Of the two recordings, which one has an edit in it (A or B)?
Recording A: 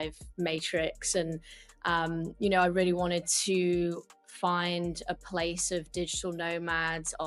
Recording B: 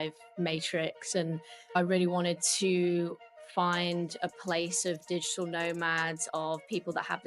B